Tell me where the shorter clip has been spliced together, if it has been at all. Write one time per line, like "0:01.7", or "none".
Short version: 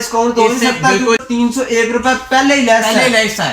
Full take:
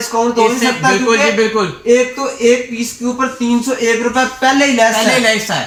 0:01.2